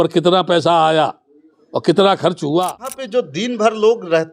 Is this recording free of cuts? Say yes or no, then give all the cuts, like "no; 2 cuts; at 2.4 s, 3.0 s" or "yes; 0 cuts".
no; 1 cut; at 2.9 s